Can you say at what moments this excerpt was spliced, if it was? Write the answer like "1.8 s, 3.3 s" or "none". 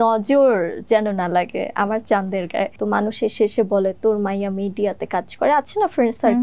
2.8 s